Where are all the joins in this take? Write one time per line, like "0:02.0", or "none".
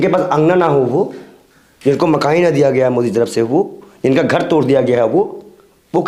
none